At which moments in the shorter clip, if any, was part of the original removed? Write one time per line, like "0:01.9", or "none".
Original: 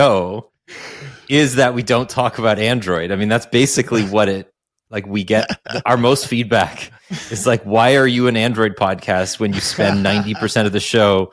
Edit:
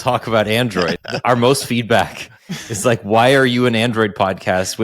0:00.9